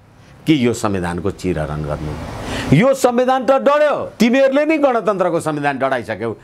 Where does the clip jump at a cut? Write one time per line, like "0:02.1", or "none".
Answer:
0:04.1